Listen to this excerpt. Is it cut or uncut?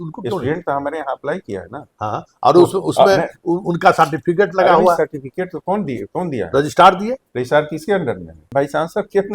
cut